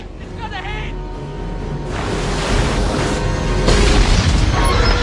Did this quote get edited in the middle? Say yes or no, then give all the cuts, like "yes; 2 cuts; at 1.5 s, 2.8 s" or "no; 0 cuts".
no; 0 cuts